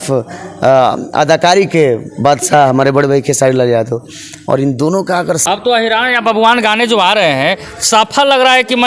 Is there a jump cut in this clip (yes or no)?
yes